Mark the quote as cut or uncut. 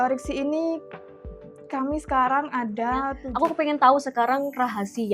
cut